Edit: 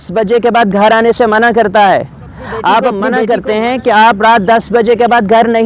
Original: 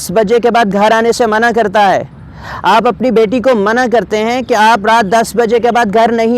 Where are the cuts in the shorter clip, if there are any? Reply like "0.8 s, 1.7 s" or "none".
3.1 s

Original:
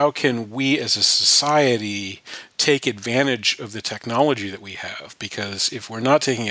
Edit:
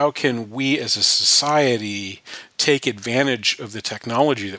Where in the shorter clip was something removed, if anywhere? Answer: none

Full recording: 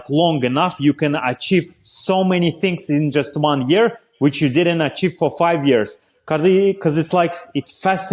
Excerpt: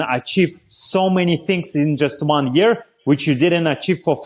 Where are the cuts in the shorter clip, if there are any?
none

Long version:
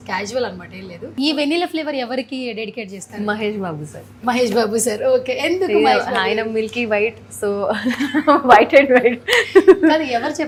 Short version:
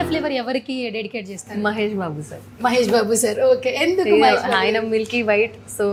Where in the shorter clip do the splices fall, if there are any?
none

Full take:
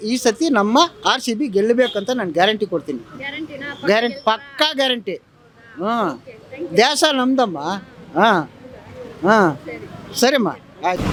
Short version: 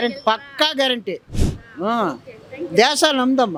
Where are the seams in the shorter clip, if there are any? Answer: none

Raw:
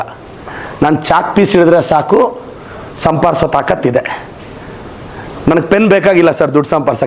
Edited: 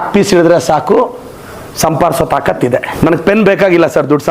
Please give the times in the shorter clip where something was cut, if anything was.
2.9 s

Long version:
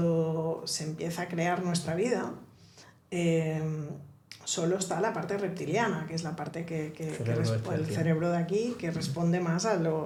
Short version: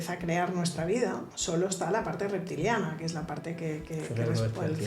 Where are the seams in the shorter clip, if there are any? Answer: 1.3 s

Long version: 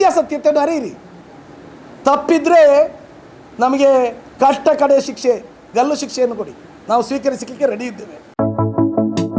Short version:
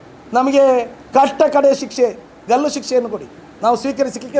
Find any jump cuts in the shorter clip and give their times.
none

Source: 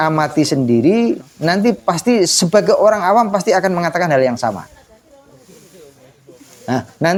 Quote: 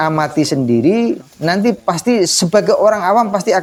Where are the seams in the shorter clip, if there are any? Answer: none

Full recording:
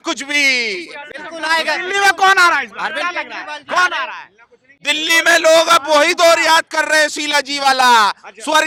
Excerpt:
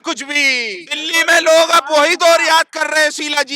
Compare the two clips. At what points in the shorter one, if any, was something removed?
1.0 s

